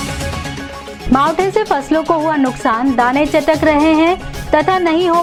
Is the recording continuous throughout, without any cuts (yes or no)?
yes